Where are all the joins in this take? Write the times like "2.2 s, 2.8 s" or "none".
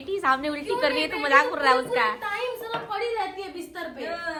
none